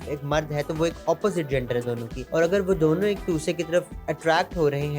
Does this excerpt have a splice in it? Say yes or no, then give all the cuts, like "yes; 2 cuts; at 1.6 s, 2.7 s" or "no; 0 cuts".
yes; 1 cut; at 2.1 s